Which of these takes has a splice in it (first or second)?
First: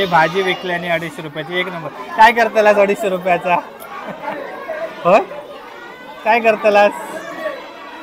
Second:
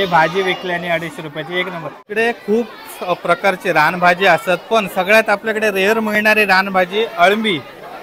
second